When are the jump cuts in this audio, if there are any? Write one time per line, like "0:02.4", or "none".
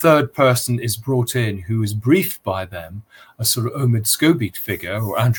none